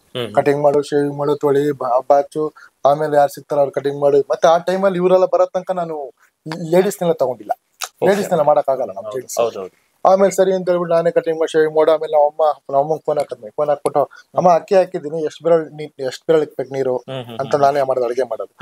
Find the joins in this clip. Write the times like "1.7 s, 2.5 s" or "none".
none